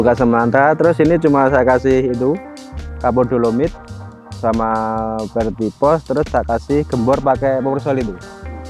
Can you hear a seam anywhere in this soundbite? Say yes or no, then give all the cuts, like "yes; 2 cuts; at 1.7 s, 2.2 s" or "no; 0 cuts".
no; 0 cuts